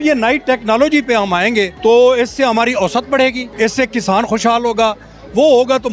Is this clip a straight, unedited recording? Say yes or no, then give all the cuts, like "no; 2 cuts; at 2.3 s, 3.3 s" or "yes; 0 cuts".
yes; 0 cuts